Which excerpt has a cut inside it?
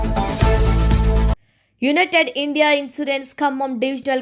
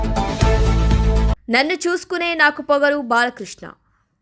first; 1 cut; at 1.4 s

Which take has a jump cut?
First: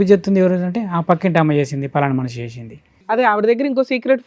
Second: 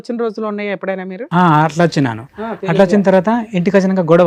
first; 1 cut; at 3.1 s

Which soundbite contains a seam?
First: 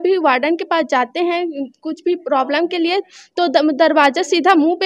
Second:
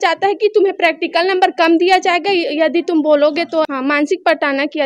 second; 1 cut; at 3.7 s

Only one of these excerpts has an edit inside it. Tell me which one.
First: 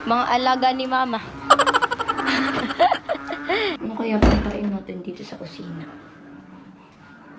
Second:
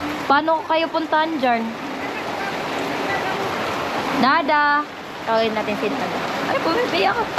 first; 1 cut; at 3.8 s

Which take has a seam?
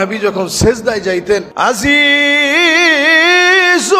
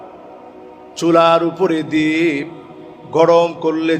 first; 1 cut; at 1.5 s

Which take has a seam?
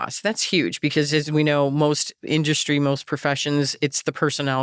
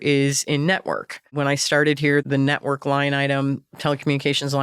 second; 2 cuts; at 1.3 s, 2.3 s

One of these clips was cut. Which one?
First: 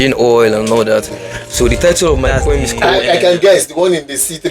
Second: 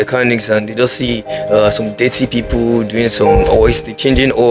first; 1 cut; at 2.8 s

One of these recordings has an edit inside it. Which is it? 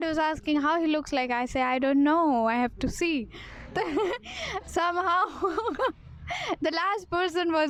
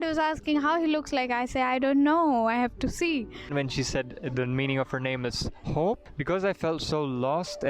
second; 2 cuts; at 3.5 s, 6.1 s

